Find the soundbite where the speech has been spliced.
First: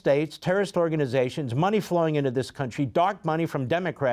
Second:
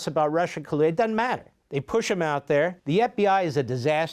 second; 2 cuts; at 1.5 s, 2.8 s

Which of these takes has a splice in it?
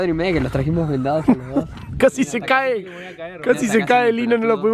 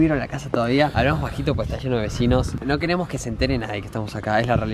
second; 1 cut; at 0.9 s

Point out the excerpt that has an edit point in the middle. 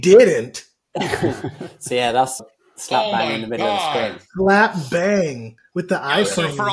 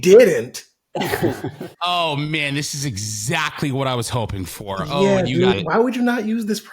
second; 2 cuts; at 1.7 s, 5.6 s

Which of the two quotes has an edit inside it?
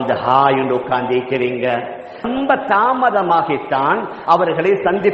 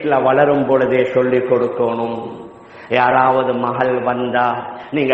first; 1 cut; at 2.3 s

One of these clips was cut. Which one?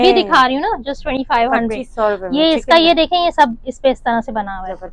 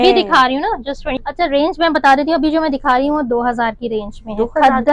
second; 1 cut; at 1.1 s

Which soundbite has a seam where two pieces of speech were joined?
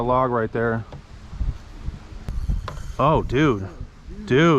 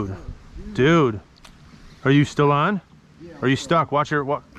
first; 1 cut; at 2.2 s

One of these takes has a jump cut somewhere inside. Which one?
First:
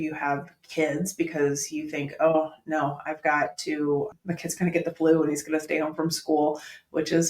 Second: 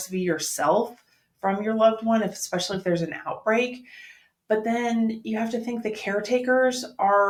first; 1 cut; at 4.2 s

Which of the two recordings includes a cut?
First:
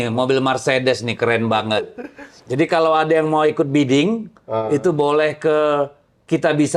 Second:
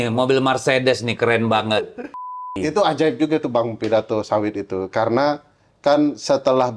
second; 1 cut; at 2.5 s

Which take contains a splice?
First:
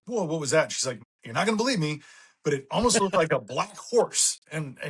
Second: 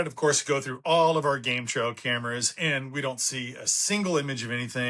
first; 1 cut; at 1.1 s

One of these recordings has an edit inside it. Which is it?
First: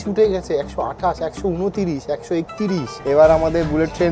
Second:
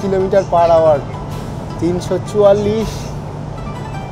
first; 1 cut; at 2.9 s

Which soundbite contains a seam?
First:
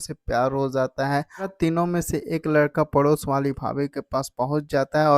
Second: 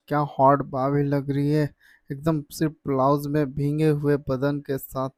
first; 1 cut; at 1.5 s

